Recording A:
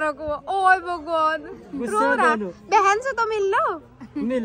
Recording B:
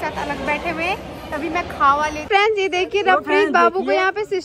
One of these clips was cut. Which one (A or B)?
B